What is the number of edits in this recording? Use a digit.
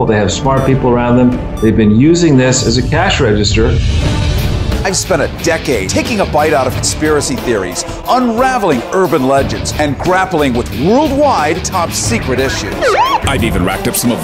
1